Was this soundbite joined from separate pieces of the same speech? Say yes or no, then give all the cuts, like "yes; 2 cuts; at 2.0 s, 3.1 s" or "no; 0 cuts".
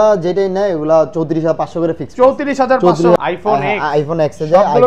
yes; 1 cut; at 3.2 s